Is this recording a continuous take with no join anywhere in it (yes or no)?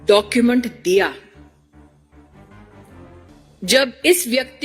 no